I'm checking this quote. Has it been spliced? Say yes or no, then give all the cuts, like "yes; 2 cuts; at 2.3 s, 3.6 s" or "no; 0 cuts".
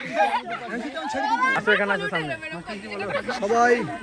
yes; 1 cut; at 1.5 s